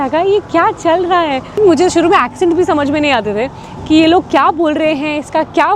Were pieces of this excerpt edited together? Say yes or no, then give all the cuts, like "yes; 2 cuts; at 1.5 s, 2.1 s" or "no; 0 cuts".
yes; 1 cut; at 1.6 s